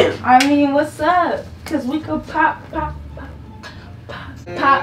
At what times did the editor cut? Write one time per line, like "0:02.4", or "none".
none